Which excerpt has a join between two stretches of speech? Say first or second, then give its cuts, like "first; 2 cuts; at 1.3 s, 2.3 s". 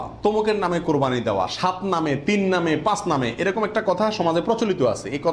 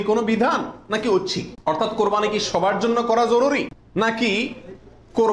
second; 2 cuts; at 1.5 s, 3.8 s